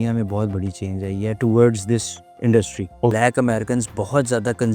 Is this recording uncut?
no; 1 cut; at 3.1 s

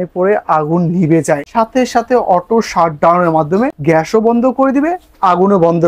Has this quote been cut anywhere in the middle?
yes; 2 cuts; at 1.5 s, 3.8 s

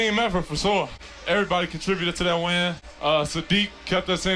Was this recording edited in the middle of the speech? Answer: yes; 2 cuts; at 1.0 s, 2.9 s

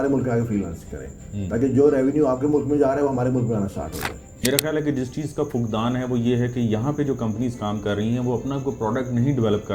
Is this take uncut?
no; 1 cut; at 4.4 s

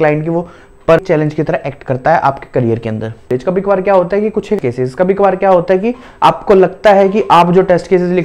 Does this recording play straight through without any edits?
no; 3 cuts; at 1.0 s, 3.3 s, 4.6 s

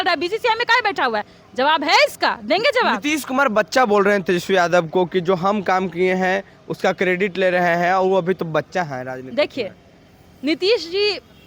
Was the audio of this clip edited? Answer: no; 0 cuts

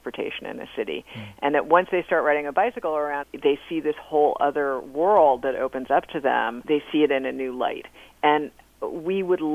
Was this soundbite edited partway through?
yes; 2 cuts; at 3.3 s, 6.6 s

